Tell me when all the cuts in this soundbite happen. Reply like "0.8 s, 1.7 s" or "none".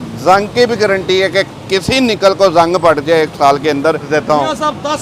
4.1 s